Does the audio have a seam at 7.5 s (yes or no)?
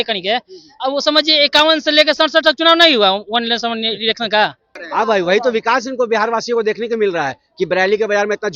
no